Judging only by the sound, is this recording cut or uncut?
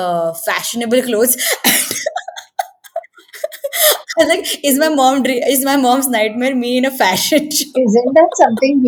uncut